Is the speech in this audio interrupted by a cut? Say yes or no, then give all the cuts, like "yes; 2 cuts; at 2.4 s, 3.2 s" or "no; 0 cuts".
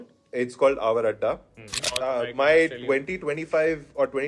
yes; 1 cut; at 1.9 s